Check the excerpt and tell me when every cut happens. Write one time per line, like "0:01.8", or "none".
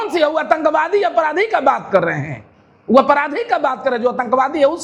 none